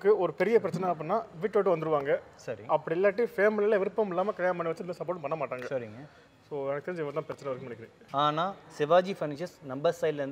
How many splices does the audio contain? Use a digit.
0